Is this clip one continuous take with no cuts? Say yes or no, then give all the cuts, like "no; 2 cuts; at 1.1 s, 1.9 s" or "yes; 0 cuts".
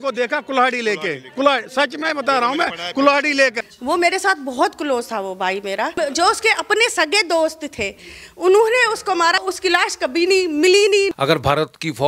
no; 4 cuts; at 3.7 s, 6.0 s, 9.4 s, 11.1 s